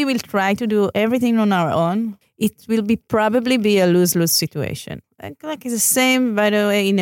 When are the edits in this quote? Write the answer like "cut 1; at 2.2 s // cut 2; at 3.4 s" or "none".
cut 1; at 0.9 s // cut 2; at 2.2 s // cut 3; at 5.0 s